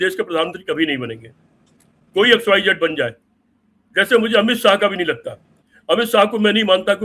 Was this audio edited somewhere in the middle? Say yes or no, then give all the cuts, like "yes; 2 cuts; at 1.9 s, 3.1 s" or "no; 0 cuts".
no; 0 cuts